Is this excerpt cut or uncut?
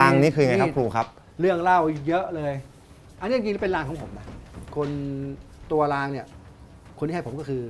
uncut